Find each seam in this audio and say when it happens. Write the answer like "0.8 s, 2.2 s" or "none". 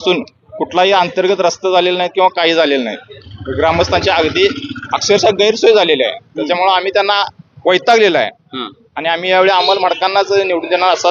none